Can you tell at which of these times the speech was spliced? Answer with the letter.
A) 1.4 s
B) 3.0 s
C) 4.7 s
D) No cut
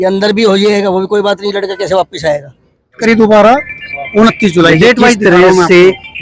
B